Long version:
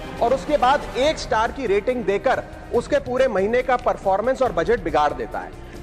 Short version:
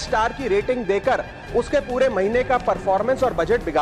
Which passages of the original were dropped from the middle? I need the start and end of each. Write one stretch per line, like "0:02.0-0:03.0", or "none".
none